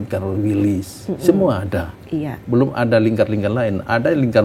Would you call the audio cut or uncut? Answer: uncut